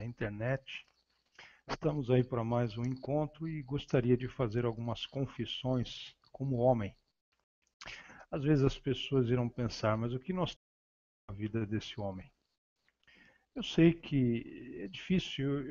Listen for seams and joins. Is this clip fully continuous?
no; 1 cut; at 4.2 s

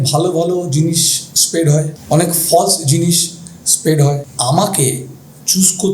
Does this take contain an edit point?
yes; 2 cuts; at 2.0 s, 4.3 s

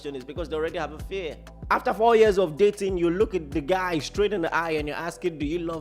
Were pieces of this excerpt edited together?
yes; 1 cut; at 1.5 s

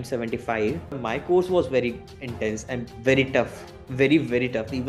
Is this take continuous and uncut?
no; 1 cut; at 1.0 s

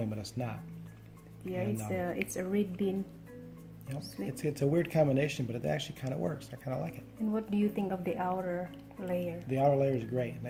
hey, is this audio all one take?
yes; 0 cuts

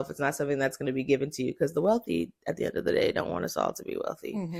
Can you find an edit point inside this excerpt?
no; 0 cuts

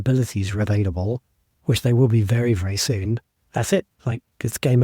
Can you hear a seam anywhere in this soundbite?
yes; 1 cut; at 3.3 s

